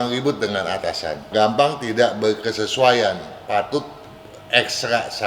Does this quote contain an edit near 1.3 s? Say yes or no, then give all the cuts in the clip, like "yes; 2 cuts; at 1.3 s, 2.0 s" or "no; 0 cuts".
yes; 1 cut; at 1.3 s